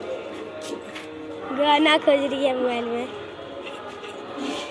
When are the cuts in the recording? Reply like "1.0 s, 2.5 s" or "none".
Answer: none